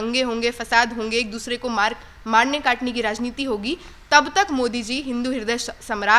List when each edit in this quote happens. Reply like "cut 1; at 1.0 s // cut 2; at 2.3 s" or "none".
none